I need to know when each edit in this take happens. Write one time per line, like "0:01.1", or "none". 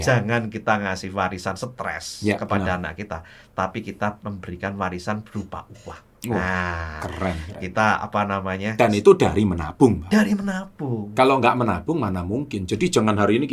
none